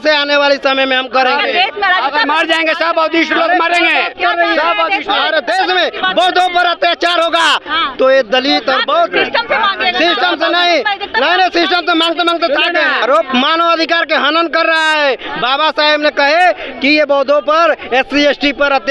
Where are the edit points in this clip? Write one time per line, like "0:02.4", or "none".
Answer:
0:13.0